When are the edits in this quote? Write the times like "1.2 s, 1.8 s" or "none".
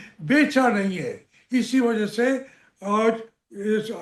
none